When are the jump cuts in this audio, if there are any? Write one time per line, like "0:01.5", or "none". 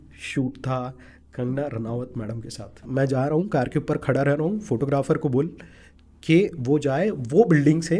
0:02.8